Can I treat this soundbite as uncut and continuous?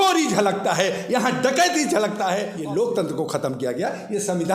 no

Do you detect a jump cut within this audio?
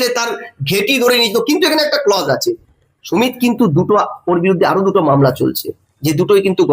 no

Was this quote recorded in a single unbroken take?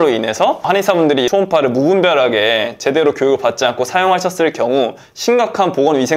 no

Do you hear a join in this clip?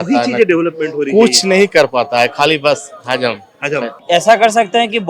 yes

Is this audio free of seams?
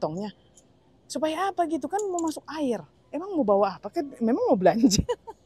yes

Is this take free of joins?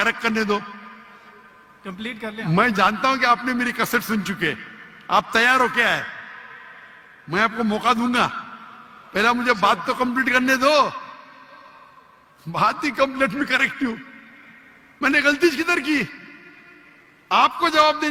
yes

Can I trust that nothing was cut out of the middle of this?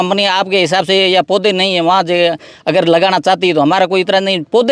yes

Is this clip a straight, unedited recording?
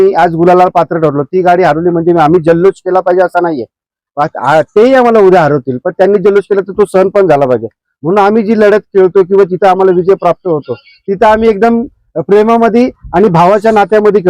yes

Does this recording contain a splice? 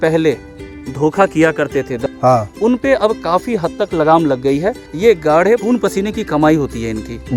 yes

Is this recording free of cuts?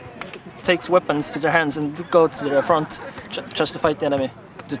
yes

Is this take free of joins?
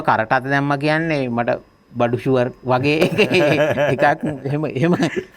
yes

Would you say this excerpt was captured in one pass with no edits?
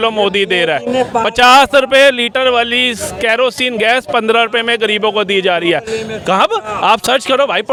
yes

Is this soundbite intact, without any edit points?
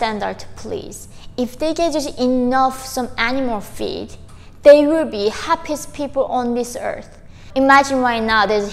no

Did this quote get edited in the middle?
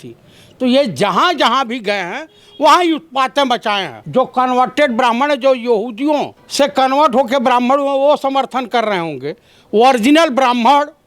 yes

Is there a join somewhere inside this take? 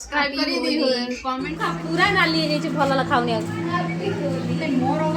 yes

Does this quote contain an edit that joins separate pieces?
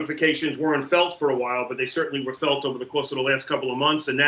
no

